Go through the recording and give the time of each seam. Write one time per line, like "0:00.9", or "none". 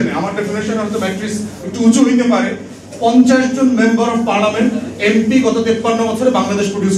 none